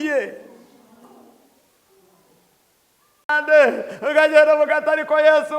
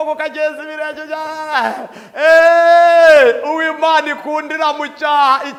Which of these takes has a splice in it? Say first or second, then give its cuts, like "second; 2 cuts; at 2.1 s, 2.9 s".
first; 1 cut; at 3.2 s